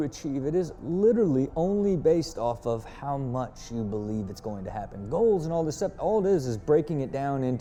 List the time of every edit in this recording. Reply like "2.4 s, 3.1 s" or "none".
none